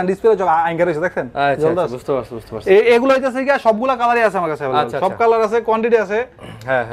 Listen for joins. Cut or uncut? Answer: uncut